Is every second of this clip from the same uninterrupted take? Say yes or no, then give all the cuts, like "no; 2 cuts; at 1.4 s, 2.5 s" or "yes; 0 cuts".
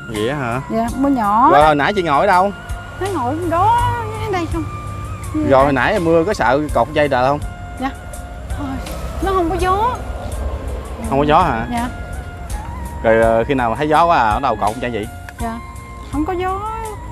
yes; 0 cuts